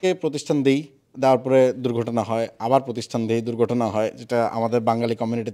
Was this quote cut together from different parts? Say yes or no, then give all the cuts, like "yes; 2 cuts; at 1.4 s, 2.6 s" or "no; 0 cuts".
no; 0 cuts